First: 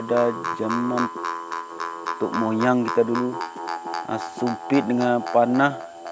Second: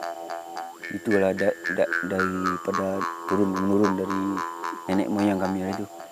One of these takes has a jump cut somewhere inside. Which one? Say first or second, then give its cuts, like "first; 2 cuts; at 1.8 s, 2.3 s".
first; 1 cut; at 4.8 s